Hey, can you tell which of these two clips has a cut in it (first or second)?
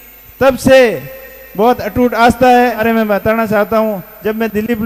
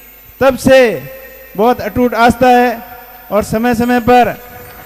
first